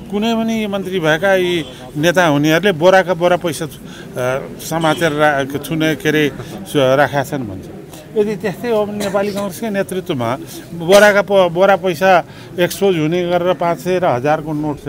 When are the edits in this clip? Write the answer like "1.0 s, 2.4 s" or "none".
none

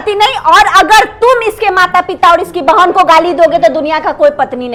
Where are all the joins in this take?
none

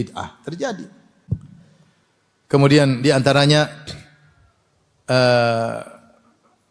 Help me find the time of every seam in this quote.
1.2 s

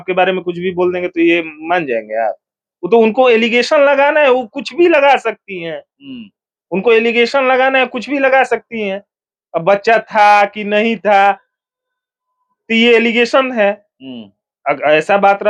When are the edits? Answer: none

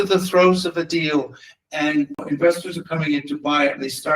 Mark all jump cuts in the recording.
2.2 s

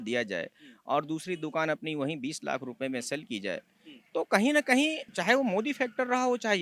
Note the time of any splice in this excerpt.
5.1 s

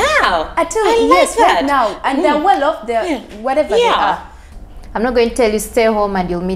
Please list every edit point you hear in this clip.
4.4 s

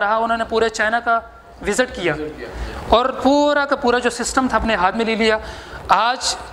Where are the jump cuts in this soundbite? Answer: none

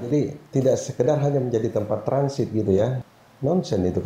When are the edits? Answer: 3.0 s

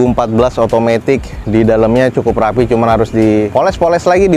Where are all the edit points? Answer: none

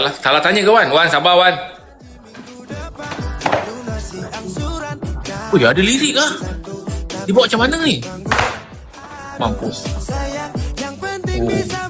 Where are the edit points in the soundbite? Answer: none

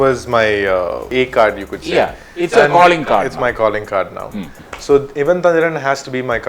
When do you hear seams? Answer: 1.1 s

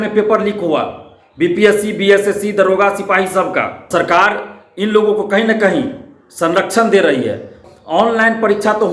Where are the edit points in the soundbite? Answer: 3.8 s, 7.6 s

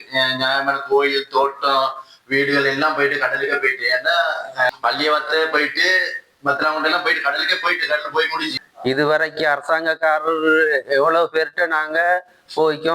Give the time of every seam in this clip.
4.7 s, 8.6 s

